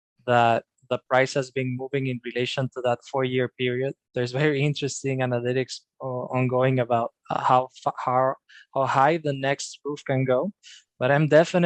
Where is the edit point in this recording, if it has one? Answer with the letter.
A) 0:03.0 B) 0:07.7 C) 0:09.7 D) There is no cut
D